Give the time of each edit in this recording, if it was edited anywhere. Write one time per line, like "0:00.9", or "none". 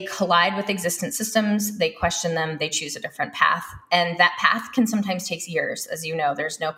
none